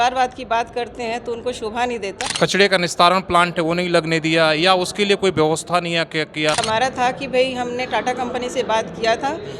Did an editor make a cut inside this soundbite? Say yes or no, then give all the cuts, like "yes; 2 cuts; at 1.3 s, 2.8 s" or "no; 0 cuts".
yes; 2 cuts; at 2.2 s, 6.6 s